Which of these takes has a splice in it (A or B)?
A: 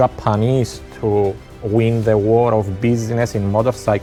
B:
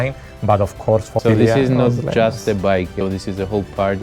B